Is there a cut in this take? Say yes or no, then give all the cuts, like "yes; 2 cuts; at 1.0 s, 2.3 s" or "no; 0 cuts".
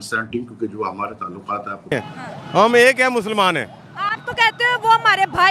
yes; 1 cut; at 1.9 s